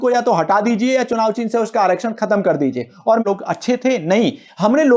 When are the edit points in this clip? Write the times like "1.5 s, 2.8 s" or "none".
3.2 s

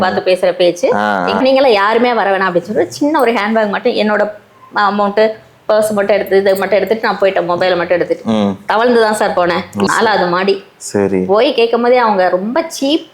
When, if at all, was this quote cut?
1.4 s, 9.9 s

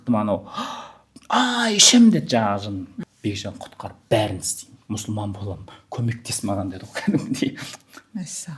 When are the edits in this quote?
2.9 s

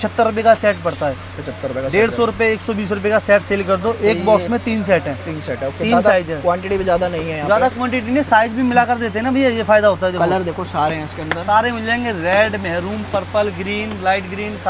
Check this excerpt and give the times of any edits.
none

